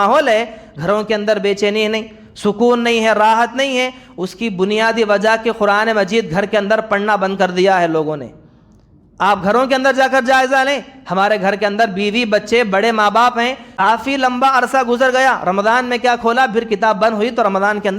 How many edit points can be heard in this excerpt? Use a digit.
1